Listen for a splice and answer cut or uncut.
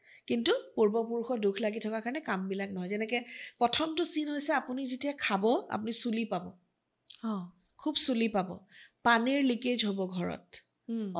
uncut